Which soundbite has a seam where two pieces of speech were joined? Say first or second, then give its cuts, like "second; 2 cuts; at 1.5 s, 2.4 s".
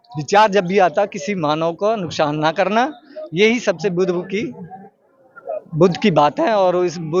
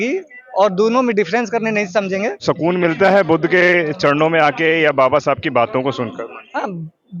second; 1 cut; at 2.4 s